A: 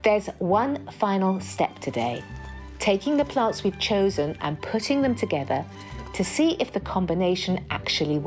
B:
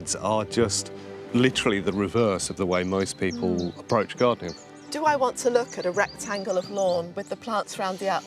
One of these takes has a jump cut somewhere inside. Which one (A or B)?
B